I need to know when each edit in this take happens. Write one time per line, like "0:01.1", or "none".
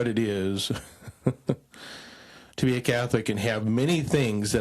none